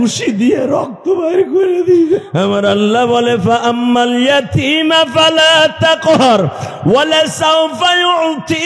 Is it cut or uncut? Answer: cut